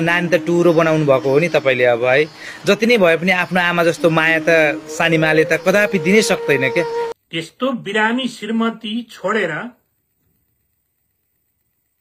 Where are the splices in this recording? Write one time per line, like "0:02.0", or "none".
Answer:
0:07.1